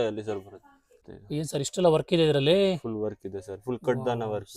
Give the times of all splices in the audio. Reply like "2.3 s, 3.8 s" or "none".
0.9 s